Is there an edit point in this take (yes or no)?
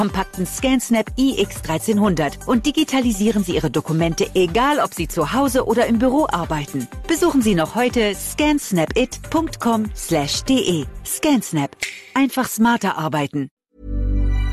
yes